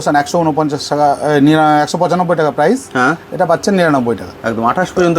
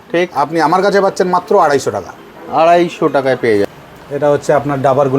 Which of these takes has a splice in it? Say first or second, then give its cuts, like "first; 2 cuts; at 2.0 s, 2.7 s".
second; 1 cut; at 3.7 s